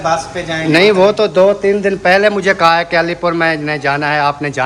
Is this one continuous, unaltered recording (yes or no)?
yes